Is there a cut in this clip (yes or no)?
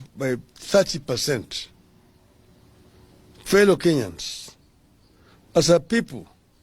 yes